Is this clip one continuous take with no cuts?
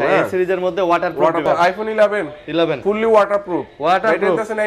no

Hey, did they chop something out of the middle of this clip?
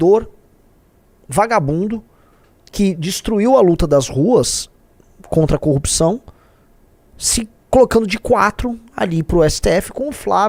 no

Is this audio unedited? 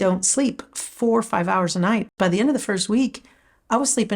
no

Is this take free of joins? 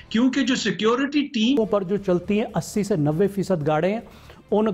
no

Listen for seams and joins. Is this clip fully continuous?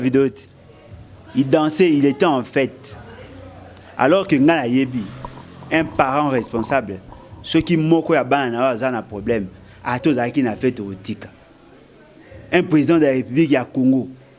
yes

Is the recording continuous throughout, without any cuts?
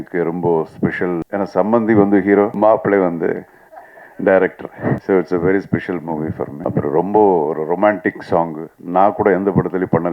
no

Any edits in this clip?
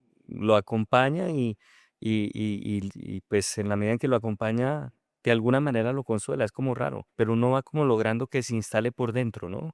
yes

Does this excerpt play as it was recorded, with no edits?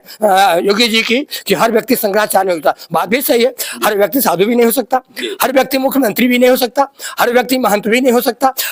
yes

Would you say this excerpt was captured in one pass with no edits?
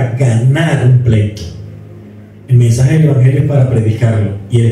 yes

